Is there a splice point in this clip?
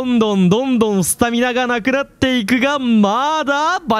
no; 0 cuts

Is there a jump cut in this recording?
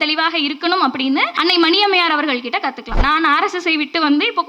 yes; 2 cuts; at 1.3 s, 3.0 s

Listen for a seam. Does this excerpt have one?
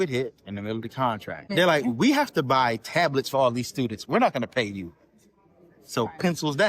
yes; 1 cut; at 1.5 s

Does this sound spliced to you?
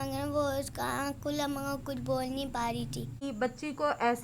yes; 1 cut; at 3.2 s

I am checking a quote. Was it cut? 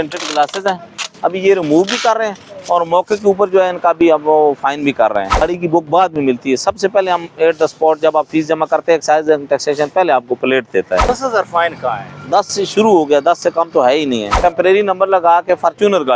yes; 3 cuts; at 5.4 s, 11.1 s, 14.4 s

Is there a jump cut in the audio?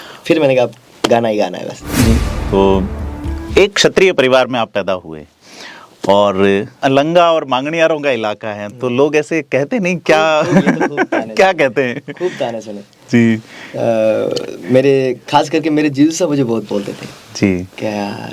yes; 1 cut; at 2.3 s

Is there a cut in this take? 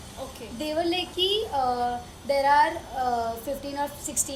no; 0 cuts

